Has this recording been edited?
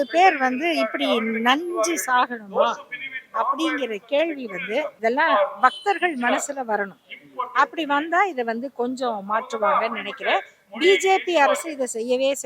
yes; 1 cut; at 4.9 s

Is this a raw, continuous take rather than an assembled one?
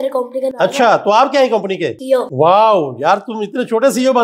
no; 1 cut; at 2.0 s

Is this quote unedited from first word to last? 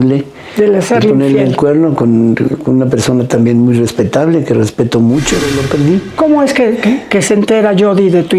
no; 1 cut; at 5.5 s

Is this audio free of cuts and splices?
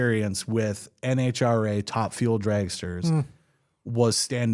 yes; 0 cuts

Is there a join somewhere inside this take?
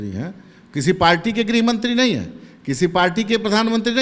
no; 0 cuts

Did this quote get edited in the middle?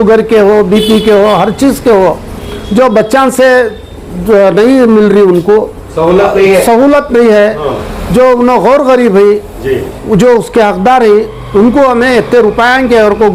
no; 0 cuts

